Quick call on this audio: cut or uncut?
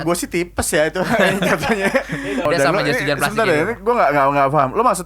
cut